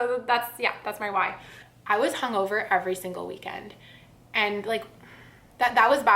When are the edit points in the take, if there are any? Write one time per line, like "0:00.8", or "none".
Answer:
0:01.7